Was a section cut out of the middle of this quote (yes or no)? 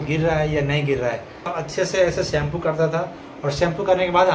yes